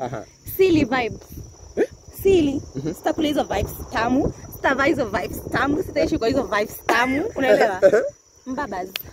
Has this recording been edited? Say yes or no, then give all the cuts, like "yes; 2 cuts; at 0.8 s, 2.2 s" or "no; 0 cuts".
no; 0 cuts